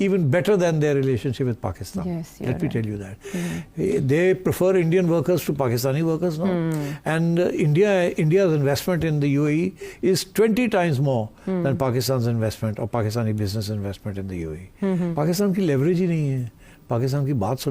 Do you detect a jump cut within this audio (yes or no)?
yes